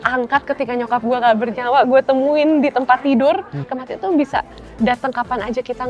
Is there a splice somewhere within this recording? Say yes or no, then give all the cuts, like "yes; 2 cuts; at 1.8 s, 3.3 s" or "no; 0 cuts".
yes; 1 cut; at 3.7 s